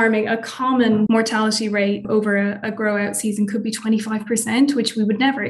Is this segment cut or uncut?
cut